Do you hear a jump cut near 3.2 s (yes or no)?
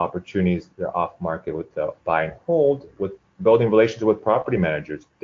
no